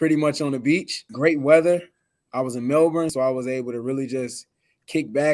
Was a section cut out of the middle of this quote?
yes; 2 cuts; at 1.0 s, 3.1 s

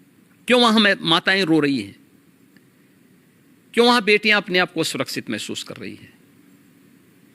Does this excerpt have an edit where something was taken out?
no; 0 cuts

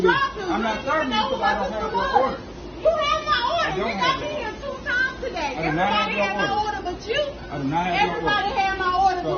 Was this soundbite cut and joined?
no; 0 cuts

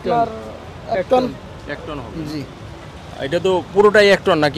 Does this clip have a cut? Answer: no; 0 cuts

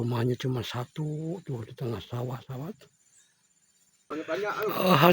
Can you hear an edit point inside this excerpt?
yes; 1 cut; at 4.1 s

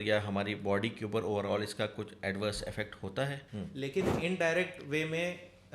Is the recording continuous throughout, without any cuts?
no; 1 cut; at 3.1 s

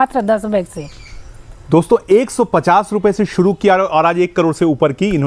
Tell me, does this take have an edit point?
no; 0 cuts

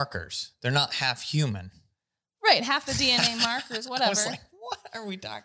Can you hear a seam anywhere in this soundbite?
no; 0 cuts

